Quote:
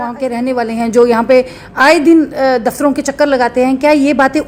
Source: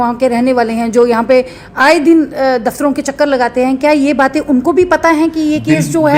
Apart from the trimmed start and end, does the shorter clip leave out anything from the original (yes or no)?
no